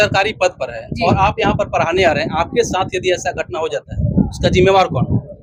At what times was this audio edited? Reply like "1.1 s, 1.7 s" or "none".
none